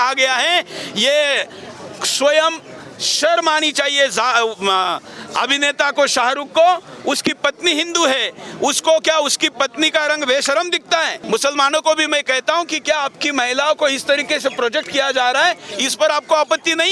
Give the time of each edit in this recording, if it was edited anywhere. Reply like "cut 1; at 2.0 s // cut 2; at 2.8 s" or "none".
none